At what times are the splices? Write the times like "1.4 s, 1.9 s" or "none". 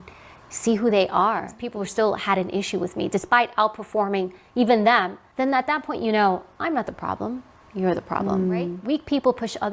1.6 s, 5.2 s, 8.8 s